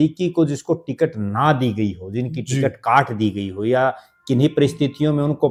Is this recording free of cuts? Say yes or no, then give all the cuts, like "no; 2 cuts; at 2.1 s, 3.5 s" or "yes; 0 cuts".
yes; 0 cuts